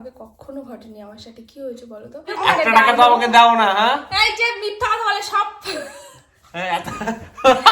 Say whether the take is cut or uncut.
cut